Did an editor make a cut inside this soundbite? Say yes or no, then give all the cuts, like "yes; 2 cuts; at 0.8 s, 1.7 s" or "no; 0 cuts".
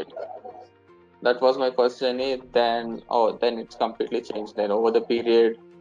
no; 0 cuts